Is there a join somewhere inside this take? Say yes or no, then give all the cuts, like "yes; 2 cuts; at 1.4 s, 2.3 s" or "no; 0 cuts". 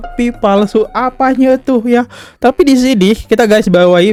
no; 0 cuts